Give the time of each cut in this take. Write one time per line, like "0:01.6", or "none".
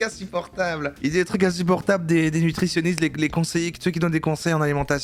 none